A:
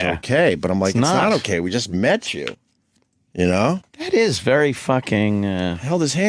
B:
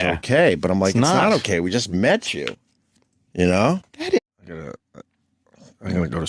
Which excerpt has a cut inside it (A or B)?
A